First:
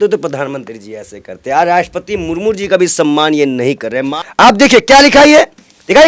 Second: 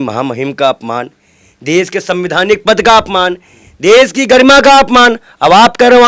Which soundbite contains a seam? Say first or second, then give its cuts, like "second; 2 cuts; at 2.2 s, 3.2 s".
first; 1 cut; at 4.1 s